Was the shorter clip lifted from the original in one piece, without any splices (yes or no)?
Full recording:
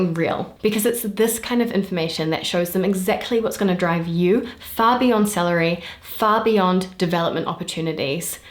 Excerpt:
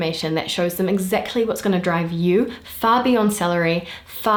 yes